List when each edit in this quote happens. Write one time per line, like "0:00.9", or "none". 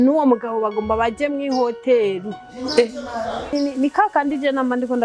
0:03.5